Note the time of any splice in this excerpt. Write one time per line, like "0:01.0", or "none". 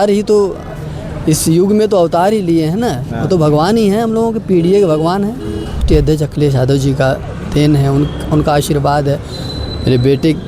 0:05.8